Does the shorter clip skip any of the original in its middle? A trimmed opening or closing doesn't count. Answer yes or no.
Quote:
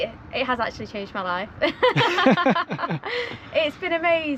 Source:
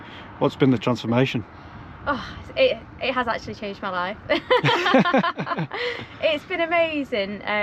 no